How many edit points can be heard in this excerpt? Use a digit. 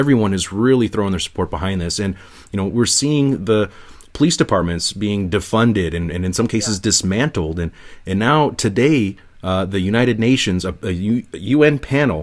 0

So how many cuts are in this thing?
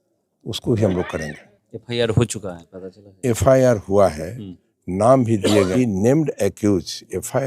1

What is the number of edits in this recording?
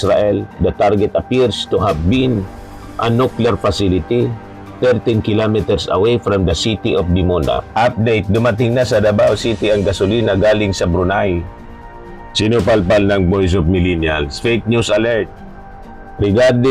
1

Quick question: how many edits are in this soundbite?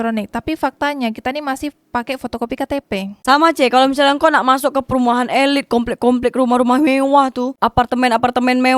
1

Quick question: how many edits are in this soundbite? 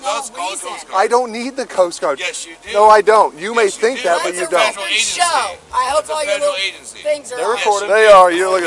1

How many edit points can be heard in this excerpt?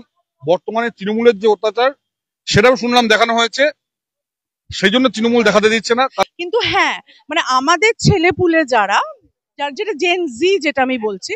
1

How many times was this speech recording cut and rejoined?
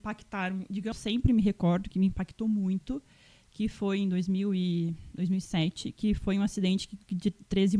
1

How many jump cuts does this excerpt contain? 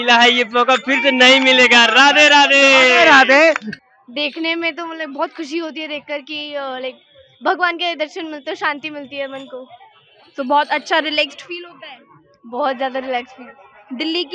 1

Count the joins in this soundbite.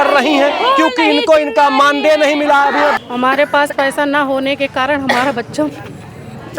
1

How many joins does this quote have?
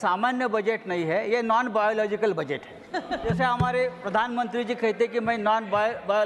1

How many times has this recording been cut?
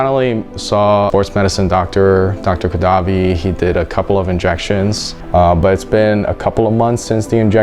2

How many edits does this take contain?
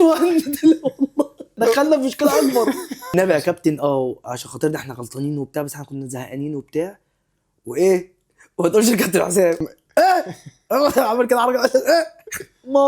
3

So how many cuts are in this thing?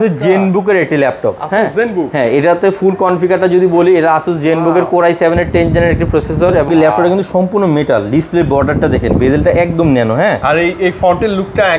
1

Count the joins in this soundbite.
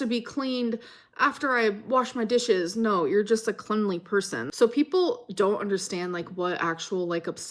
1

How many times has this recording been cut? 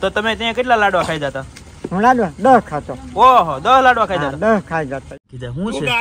1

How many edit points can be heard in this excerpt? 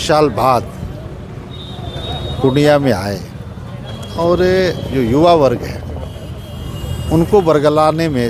0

